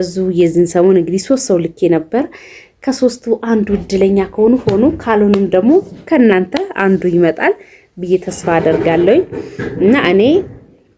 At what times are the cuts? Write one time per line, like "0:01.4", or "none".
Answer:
none

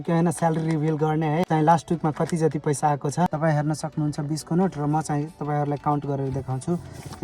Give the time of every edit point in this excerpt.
0:01.5
0:03.3

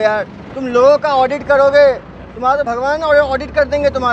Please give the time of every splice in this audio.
none

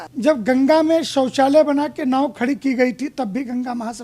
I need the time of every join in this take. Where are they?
none

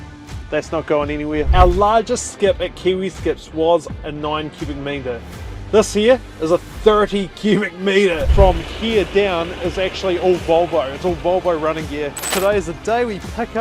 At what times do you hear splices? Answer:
0:01.5
0:08.3
0:12.3

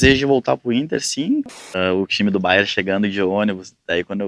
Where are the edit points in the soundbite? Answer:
0:01.6

